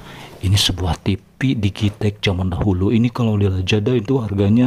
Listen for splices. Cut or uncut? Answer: uncut